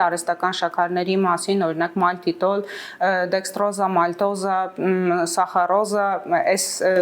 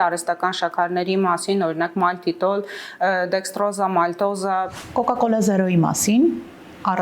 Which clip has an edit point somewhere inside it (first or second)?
second